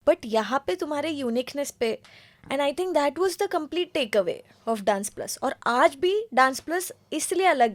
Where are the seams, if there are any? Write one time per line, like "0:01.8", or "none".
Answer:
none